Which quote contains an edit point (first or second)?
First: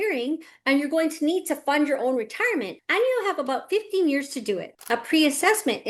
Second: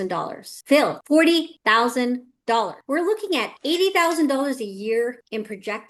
first